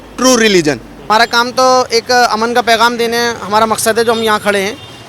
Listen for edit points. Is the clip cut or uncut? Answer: cut